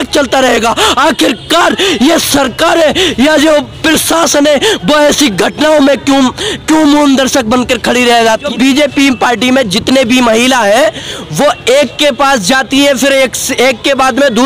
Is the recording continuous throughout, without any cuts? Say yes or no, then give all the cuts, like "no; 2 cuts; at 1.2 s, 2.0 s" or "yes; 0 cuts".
no; 1 cut; at 8.5 s